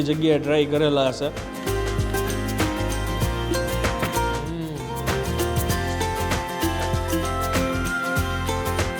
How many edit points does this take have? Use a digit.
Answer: 1